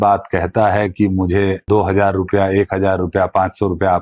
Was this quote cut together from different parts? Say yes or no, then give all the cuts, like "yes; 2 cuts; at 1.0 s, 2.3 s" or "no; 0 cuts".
yes; 1 cut; at 1.6 s